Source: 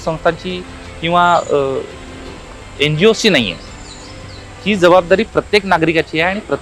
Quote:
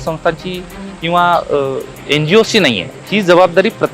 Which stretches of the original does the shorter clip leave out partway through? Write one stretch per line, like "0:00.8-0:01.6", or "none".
0:01.9-0:02.6
0:03.6-0:04.5